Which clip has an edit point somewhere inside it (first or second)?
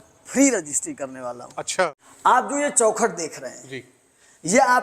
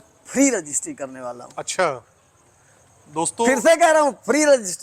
first